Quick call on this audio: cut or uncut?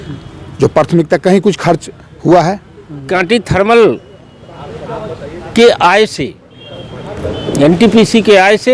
cut